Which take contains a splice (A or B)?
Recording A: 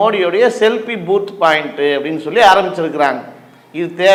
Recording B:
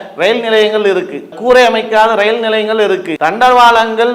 B